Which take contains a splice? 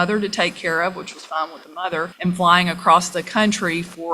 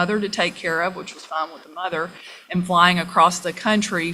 first; 1 cut; at 2.1 s

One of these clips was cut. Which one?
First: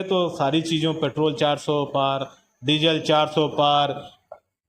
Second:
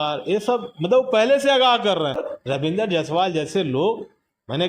second; 1 cut; at 2.3 s

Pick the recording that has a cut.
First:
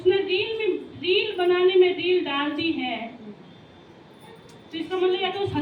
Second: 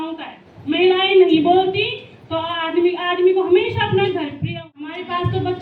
second; 1 cut; at 4.4 s

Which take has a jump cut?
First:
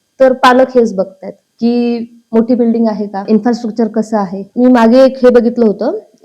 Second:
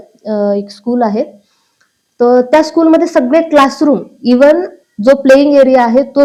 first; 2 cuts; at 3.2 s, 4.4 s

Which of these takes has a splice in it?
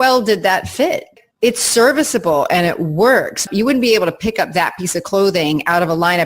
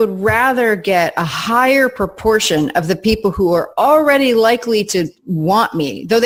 first; 2 cuts; at 1.1 s, 3.4 s

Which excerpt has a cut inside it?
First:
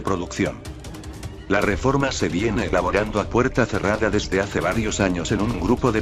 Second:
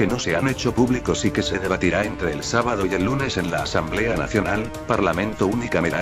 first; 1 cut; at 4.4 s

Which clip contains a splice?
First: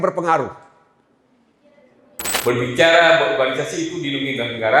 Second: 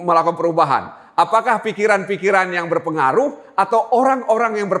first; 1 cut; at 2.3 s

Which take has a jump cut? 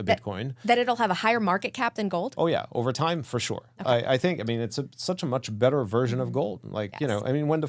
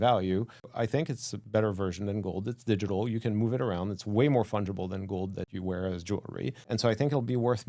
second; 3 cuts; at 0.9 s, 5.5 s, 6.6 s

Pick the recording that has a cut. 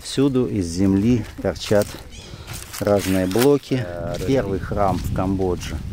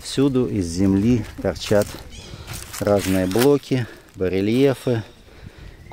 first; 1 cut; at 4.1 s

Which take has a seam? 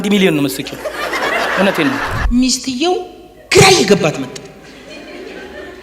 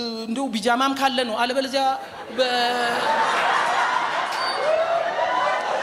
first; 1 cut; at 2.1 s

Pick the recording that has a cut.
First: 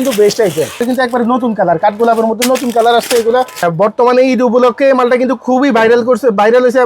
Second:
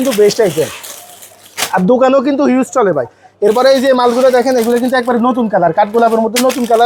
first; 2 cuts; at 0.8 s, 3.7 s

